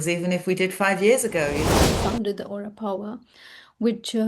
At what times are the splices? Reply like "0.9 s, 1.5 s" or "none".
1.7 s